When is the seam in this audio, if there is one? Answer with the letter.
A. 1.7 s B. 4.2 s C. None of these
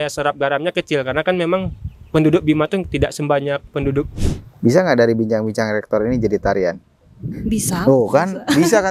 B